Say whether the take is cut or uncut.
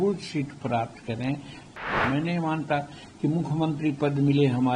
cut